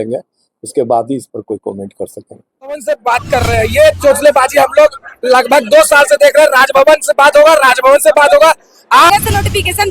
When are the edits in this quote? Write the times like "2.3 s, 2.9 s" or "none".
2.8 s, 9.1 s